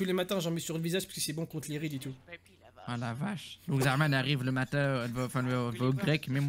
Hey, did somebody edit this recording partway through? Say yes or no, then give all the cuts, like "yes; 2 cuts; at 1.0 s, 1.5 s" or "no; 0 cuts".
no; 0 cuts